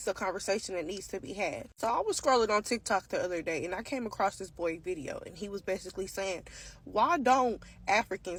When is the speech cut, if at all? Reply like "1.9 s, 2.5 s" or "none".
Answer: none